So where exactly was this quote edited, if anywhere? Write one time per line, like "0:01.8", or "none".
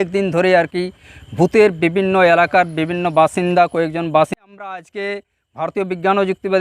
0:04.4